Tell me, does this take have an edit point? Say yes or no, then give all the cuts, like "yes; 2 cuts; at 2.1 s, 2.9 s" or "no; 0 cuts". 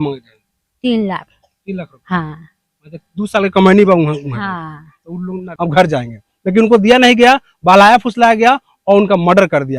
yes; 1 cut; at 5.5 s